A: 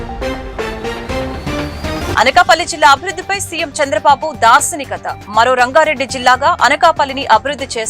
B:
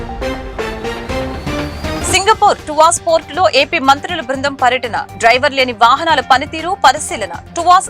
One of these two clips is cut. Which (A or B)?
A